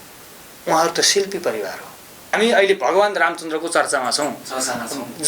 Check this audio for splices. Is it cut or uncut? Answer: cut